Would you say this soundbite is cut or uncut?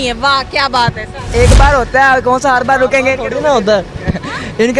cut